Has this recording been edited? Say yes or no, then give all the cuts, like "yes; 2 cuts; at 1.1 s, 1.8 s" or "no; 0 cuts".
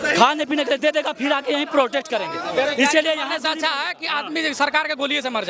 no; 0 cuts